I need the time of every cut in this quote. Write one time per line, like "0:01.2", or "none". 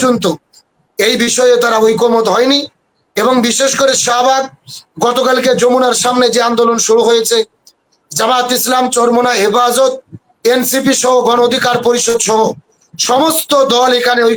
none

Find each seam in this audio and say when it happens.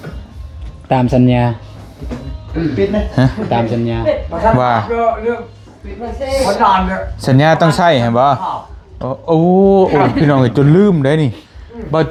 none

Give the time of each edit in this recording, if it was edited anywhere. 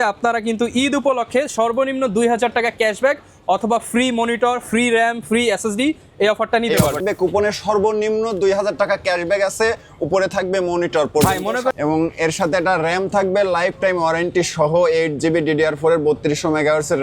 0:07.0
0:11.7

